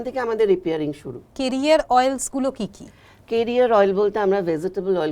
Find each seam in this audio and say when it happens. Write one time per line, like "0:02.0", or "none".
0:01.3